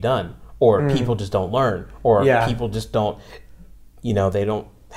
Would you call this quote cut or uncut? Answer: uncut